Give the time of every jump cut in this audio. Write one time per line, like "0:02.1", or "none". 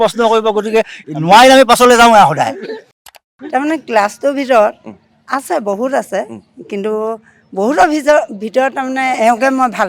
0:03.2

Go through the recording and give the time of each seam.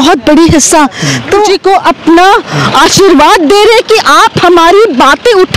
0:01.5

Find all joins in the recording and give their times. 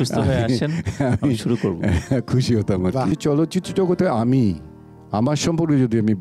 0:03.2

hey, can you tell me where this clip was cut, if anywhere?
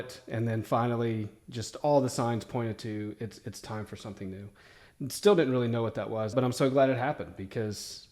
0:06.3

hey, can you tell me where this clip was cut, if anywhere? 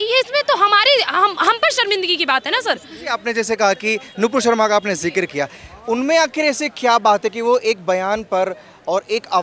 none

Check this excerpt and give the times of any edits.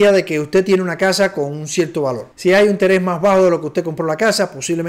none

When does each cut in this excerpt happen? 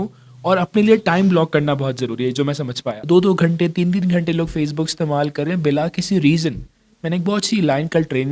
0:02.9

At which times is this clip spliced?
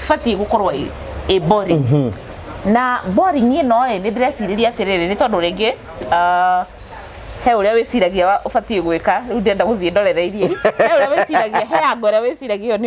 none

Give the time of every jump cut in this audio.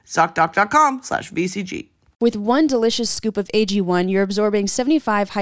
0:02.2

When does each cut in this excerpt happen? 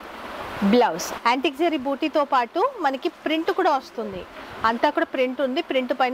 0:01.2

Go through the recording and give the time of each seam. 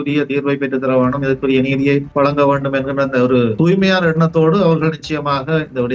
0:02.1
0:03.6

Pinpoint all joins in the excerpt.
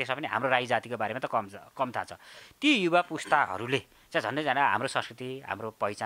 none

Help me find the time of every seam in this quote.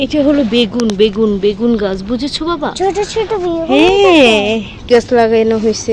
0:04.9

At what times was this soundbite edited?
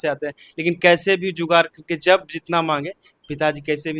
none

